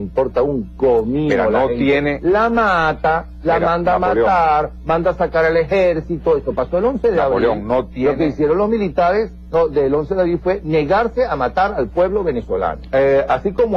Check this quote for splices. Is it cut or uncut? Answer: cut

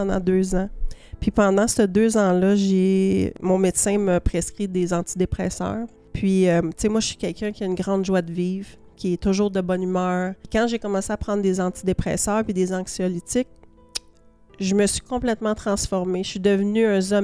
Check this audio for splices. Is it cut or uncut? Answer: cut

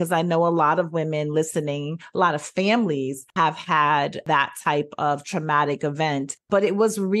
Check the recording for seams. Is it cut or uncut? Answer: cut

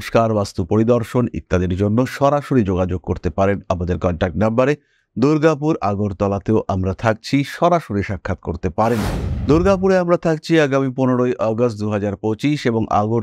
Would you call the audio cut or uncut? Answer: uncut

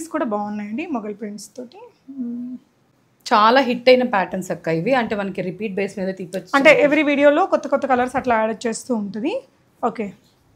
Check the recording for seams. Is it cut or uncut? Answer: uncut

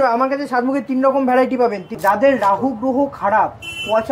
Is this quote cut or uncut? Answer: cut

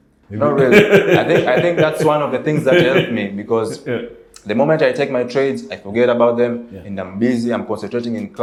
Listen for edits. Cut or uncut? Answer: uncut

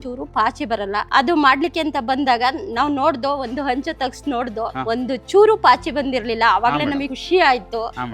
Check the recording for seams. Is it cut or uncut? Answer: cut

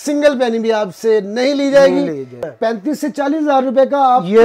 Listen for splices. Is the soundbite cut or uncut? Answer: cut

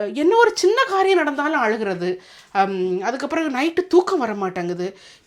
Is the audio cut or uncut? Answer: uncut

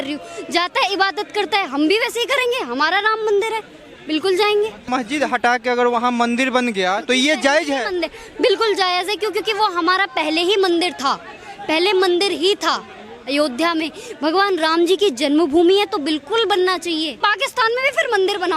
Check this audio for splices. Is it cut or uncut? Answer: cut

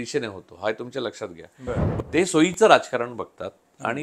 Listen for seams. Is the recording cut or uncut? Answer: cut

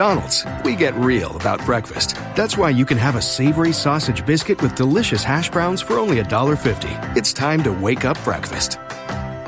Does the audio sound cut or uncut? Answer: uncut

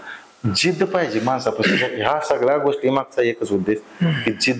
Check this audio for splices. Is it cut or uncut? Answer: uncut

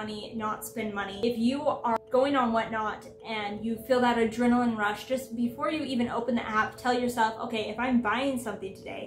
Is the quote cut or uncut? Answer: cut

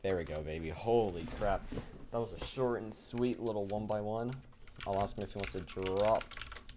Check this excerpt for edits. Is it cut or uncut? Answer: uncut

